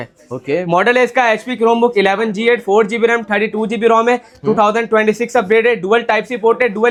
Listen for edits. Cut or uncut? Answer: uncut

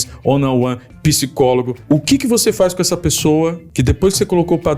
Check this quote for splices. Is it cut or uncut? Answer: cut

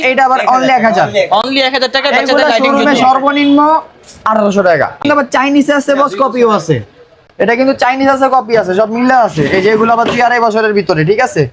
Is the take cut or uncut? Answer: uncut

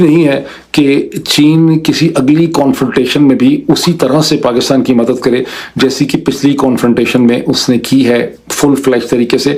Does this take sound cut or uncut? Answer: uncut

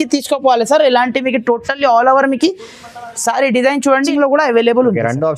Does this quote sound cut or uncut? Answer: cut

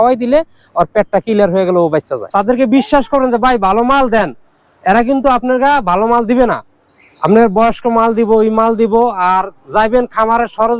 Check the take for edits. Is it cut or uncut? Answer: cut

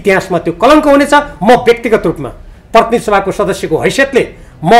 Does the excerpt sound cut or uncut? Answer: uncut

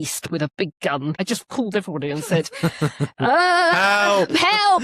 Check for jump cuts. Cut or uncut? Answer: cut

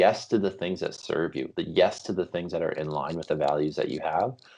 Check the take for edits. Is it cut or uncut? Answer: uncut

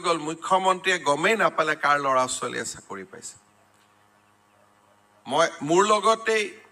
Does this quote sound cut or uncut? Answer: cut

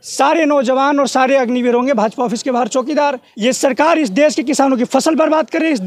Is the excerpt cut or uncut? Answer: cut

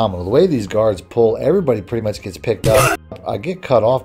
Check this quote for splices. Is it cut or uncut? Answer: uncut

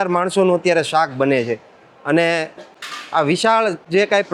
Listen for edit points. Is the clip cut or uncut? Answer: uncut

